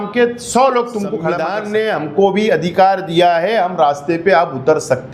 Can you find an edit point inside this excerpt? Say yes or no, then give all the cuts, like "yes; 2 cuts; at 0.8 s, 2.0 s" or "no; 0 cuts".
yes; 1 cut; at 1.4 s